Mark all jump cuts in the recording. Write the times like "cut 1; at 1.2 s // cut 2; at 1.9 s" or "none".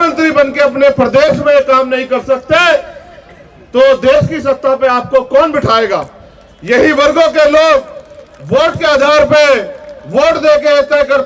none